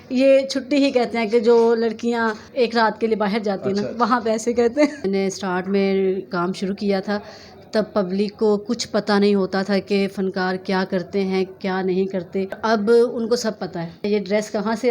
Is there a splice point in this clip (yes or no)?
yes